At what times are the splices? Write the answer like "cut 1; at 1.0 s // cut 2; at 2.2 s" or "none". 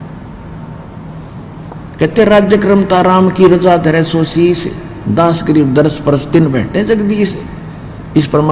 cut 1; at 1.0 s